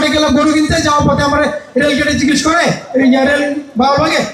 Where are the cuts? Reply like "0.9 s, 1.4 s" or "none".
none